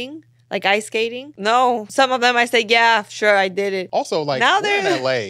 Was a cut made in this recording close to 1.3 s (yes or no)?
yes